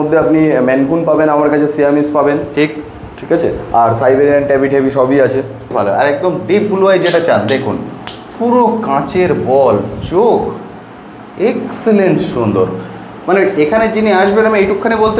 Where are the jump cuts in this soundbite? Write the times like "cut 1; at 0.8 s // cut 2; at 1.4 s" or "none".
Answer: cut 1; at 5.7 s

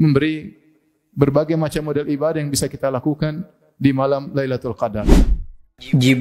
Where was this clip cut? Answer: cut 1; at 5.0 s

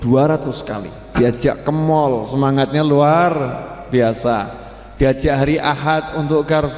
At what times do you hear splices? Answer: cut 1; at 1.0 s

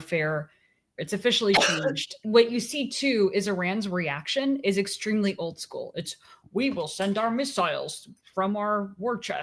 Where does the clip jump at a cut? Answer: cut 1; at 1.0 s // cut 2; at 2.2 s

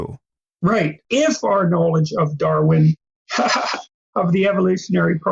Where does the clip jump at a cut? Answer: cut 1; at 1.0 s

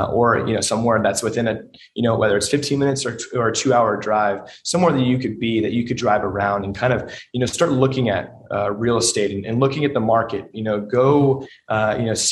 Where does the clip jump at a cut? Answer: none

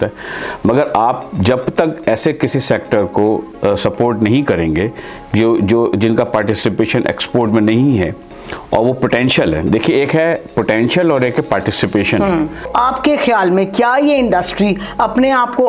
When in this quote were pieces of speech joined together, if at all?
cut 1; at 12.7 s

